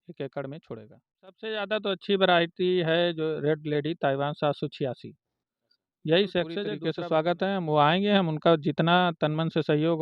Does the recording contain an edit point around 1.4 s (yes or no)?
yes